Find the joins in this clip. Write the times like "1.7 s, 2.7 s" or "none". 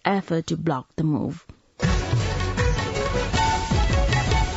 1.6 s

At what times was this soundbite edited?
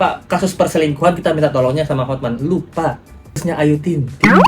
3.4 s

